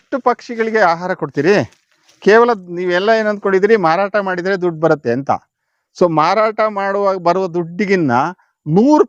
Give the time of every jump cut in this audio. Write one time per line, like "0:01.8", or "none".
none